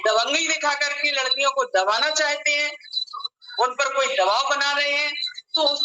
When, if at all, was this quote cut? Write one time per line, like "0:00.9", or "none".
none